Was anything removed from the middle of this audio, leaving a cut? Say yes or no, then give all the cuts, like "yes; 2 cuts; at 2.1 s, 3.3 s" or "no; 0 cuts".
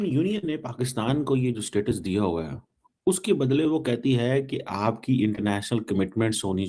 no; 0 cuts